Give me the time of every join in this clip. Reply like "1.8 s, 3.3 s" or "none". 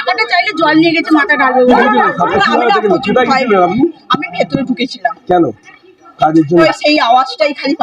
1.7 s, 6.6 s